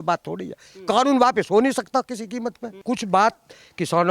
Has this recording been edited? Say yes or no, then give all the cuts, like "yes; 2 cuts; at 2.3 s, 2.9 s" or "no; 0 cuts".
yes; 1 cut; at 2.7 s